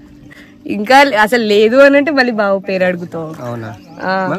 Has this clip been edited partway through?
no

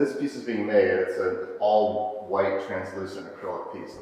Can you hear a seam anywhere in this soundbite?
no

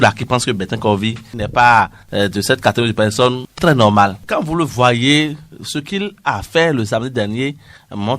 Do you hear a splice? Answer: yes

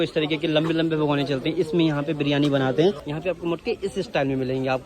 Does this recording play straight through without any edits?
no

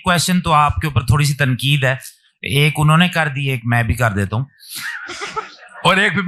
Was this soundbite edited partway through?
no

